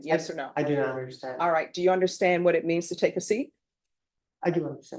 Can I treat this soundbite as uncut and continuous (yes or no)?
yes